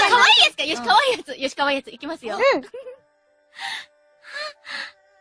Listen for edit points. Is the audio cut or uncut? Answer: uncut